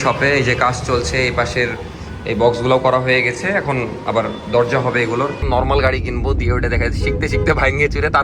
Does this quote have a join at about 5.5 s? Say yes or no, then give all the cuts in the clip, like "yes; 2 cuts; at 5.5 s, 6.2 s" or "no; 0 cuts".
yes; 1 cut; at 5.5 s